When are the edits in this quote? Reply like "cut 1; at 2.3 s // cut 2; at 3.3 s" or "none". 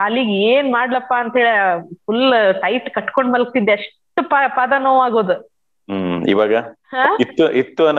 cut 1; at 6.8 s